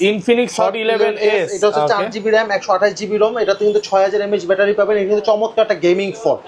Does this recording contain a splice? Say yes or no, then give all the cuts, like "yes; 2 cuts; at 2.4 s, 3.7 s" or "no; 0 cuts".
no; 0 cuts